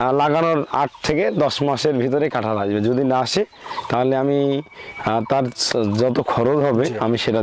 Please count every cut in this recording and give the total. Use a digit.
0